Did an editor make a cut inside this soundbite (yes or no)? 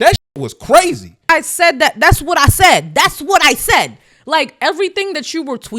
yes